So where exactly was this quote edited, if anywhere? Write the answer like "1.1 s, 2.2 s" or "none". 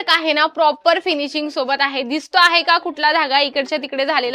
none